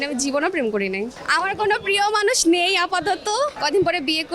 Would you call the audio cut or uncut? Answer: cut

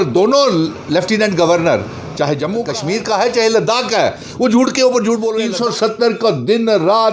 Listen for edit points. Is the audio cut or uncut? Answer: cut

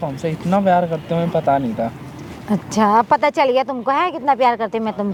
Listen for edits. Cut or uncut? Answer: uncut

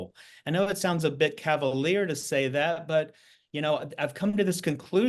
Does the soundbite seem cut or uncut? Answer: uncut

